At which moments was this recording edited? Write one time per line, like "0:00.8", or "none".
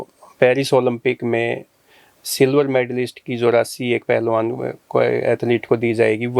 none